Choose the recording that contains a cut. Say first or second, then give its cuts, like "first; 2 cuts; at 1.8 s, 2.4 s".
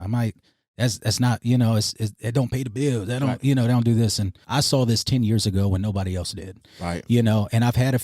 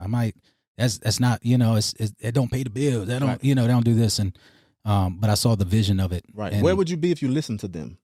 first; 1 cut; at 4.3 s